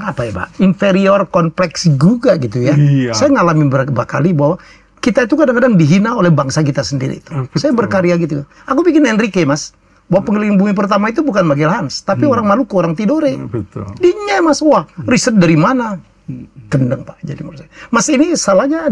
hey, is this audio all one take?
yes; 0 cuts

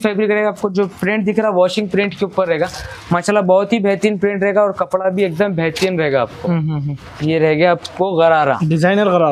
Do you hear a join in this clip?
no; 0 cuts

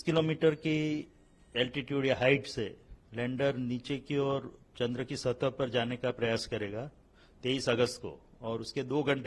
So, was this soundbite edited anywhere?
no; 0 cuts

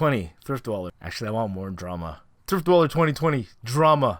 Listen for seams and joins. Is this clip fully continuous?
no; 1 cut; at 1.0 s

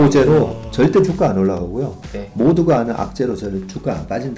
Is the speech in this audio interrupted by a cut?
no; 0 cuts

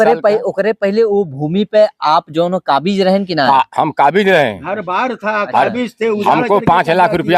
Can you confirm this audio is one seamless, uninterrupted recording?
yes; 0 cuts

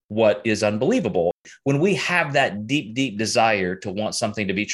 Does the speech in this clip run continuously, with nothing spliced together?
no; 1 cut; at 1.4 s

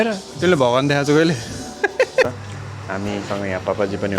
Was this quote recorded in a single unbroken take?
no; 1 cut; at 2.2 s

